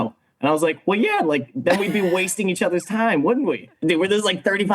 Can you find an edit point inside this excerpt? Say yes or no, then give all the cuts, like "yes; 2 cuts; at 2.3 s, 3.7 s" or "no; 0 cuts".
yes; 1 cut; at 3.7 s